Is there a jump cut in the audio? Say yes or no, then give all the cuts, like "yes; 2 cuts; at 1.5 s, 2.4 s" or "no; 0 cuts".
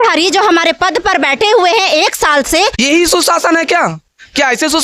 yes; 1 cut; at 2.8 s